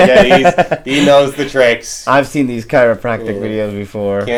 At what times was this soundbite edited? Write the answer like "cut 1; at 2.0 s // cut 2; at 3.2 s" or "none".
none

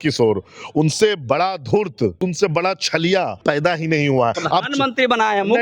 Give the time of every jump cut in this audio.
cut 1; at 2.2 s // cut 2; at 3.4 s // cut 3; at 4.4 s

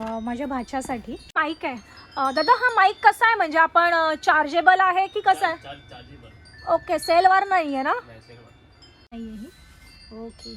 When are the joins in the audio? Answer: cut 1; at 1.3 s // cut 2; at 9.1 s

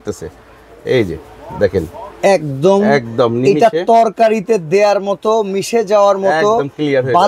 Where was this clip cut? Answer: none

